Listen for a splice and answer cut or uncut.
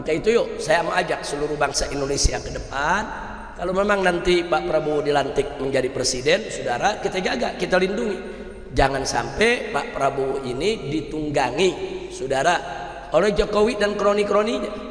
uncut